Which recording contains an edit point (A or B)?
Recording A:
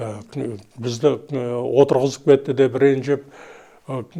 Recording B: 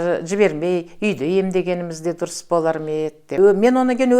B